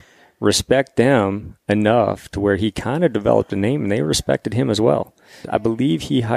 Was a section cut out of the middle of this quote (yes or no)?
yes